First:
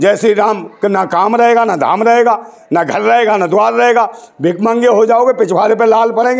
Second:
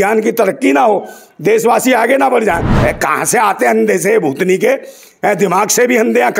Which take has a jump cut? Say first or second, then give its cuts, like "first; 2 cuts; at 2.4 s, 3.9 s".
second; 1 cut; at 2.7 s